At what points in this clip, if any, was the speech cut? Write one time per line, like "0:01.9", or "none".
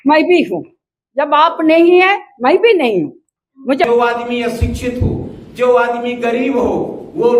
0:03.8